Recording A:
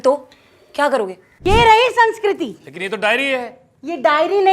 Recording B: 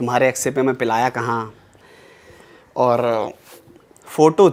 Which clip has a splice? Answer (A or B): A